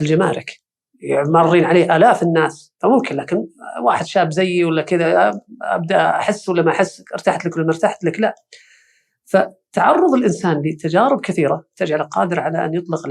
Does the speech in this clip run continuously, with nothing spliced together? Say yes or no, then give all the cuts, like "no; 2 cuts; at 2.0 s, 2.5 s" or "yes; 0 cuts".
yes; 0 cuts